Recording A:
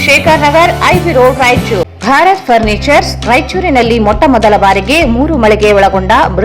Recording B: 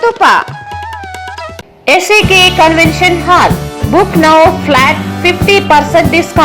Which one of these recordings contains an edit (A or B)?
B